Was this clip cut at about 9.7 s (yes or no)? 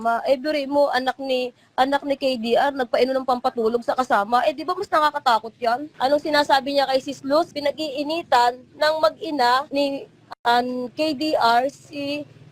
yes